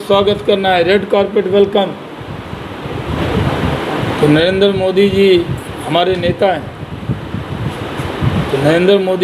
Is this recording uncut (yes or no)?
no